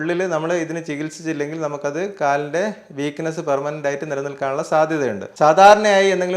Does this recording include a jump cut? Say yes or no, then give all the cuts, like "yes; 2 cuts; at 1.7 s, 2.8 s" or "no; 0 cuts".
yes; 1 cut; at 5.2 s